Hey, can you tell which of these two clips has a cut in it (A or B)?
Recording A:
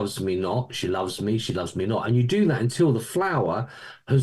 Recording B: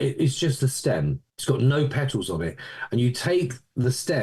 B